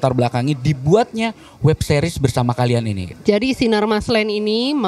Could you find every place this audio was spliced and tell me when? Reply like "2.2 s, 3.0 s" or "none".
3.0 s